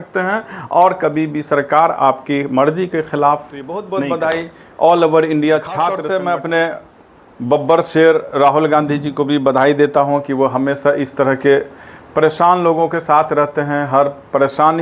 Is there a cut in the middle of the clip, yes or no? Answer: yes